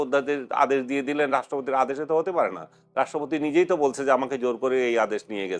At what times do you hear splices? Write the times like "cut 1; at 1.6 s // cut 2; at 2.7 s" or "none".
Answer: none